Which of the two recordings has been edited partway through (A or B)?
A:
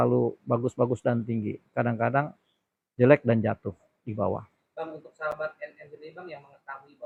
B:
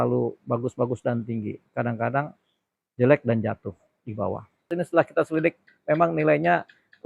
B